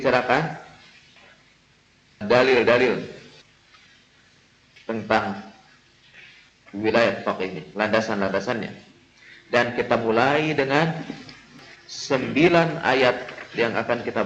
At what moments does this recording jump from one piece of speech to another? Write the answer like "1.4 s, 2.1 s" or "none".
none

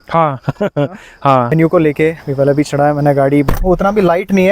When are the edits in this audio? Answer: 1.5 s, 3.5 s

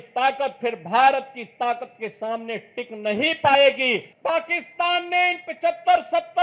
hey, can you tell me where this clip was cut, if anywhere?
4.1 s

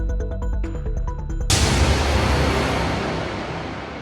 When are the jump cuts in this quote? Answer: 1.4 s

